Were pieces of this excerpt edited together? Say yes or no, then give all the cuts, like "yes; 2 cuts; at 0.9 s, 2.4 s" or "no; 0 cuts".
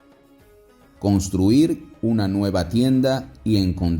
yes; 1 cut; at 1.0 s